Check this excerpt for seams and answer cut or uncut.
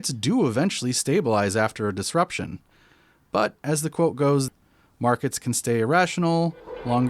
cut